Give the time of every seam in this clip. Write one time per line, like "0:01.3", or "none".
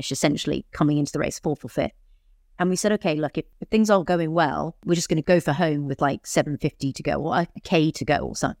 0:03.5
0:05.1

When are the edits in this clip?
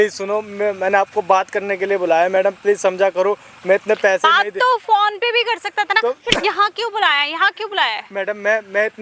none

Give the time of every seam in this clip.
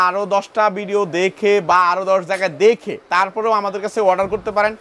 none

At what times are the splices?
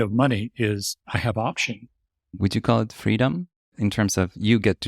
0:00.9
0:02.3
0:03.7

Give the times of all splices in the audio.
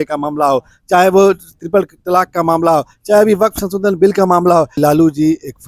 0:04.7

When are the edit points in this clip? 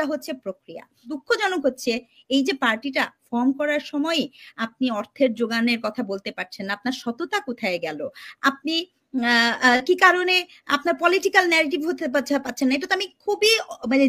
0:01.1

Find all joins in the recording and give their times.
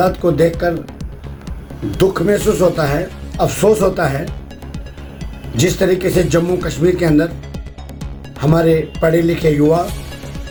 none

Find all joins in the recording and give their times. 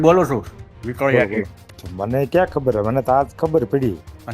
0:01.9

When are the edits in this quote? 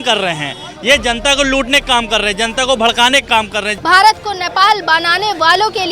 0:03.7

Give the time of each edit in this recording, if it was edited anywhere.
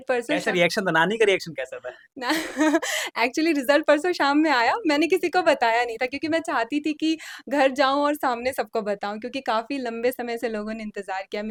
none

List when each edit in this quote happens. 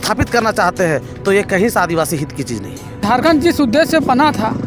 0:03.0

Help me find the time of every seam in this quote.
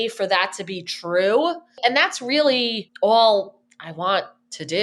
0:01.8
0:02.8

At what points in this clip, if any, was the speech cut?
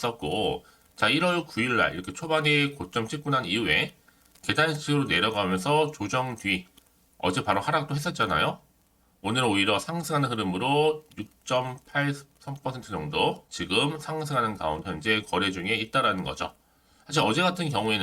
0:13.5

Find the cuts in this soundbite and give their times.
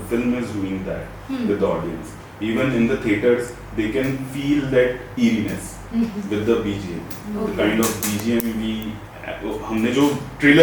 none

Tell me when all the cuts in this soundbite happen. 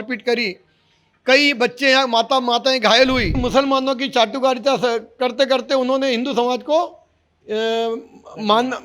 0:03.3

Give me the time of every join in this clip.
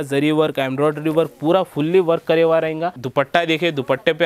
0:03.0

